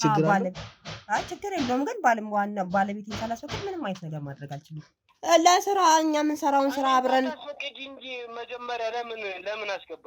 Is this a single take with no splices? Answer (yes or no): no